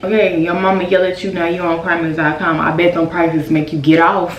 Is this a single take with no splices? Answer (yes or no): yes